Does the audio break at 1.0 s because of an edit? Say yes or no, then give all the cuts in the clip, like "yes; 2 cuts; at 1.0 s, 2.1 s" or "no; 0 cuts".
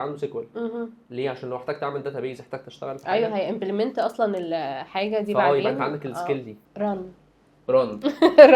no; 1 cut; at 6.6 s